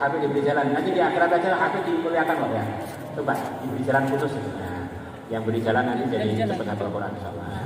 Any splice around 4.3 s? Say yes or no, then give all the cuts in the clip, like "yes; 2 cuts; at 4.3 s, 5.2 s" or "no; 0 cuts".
no; 0 cuts